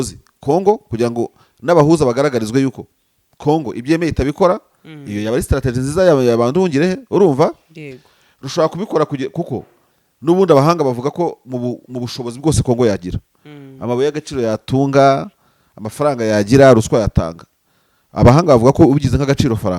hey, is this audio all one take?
yes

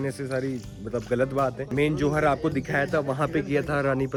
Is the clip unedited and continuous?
yes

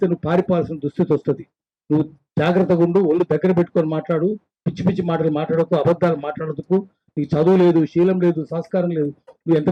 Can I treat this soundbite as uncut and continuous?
yes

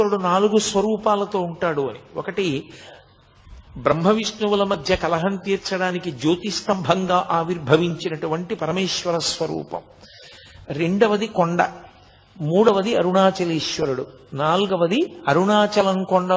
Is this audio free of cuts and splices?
yes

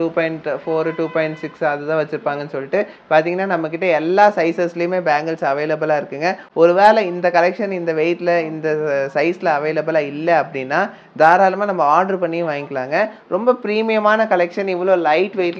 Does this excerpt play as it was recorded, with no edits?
yes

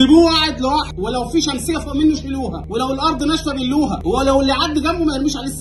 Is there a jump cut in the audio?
yes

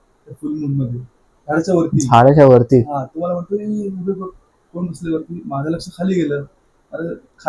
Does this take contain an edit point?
no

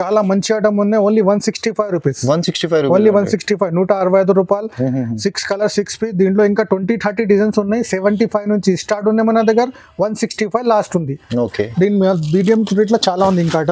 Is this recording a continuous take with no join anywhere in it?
yes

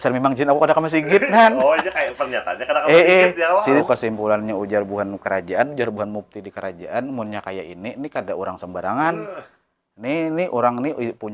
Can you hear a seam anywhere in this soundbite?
yes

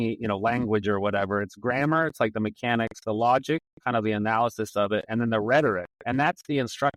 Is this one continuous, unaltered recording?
yes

